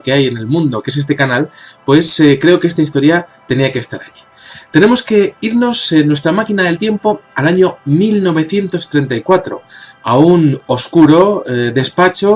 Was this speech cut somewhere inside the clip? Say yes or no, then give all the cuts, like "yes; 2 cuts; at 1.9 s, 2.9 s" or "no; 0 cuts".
yes; 1 cut; at 9.9 s